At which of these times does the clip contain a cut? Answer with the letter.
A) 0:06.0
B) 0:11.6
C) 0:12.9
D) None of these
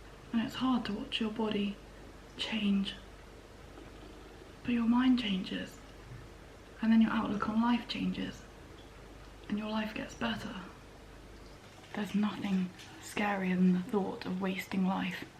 B